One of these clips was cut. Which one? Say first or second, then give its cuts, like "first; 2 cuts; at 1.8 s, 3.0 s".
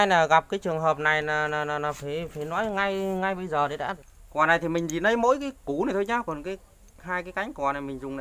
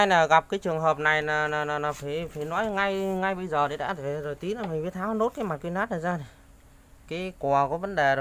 first; 1 cut; at 4.0 s